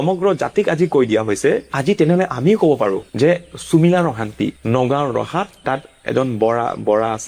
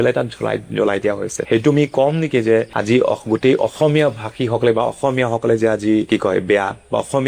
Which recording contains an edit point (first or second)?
second